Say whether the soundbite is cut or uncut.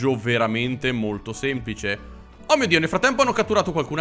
uncut